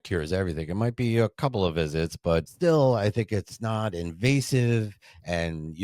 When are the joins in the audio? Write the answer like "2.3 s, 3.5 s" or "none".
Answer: 2.5 s